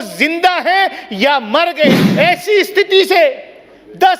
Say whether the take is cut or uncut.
cut